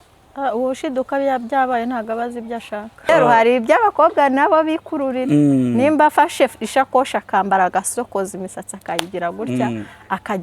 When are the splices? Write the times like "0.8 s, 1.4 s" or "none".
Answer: 3.1 s